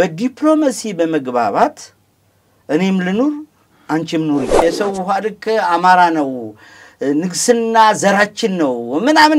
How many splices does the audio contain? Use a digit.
1